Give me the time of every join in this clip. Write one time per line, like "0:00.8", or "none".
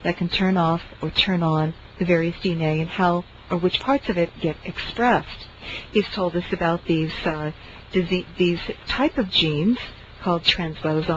0:05.6